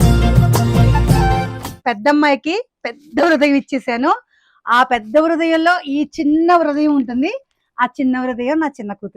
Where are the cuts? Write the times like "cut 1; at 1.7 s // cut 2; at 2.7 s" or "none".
cut 1; at 1.6 s